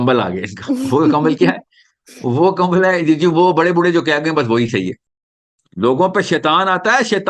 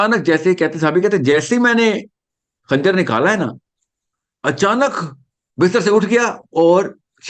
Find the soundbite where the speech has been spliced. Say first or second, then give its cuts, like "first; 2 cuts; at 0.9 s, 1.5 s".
first; 1 cut; at 5.0 s